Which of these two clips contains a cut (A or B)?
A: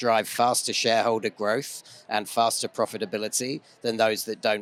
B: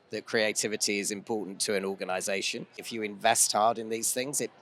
B